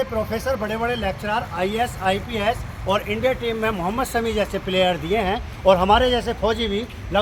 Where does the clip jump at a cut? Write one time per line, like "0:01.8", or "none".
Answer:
none